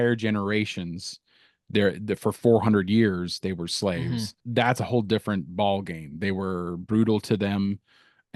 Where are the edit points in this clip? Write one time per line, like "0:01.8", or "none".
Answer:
0:04.4